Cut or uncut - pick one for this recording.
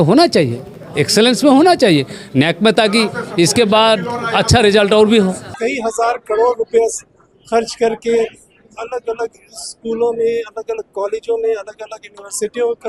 cut